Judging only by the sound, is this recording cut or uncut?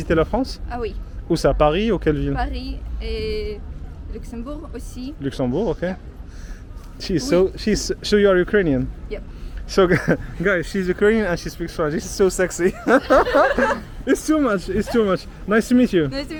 uncut